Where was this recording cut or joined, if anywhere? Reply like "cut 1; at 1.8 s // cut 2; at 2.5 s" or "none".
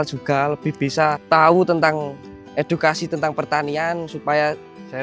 cut 1; at 1.2 s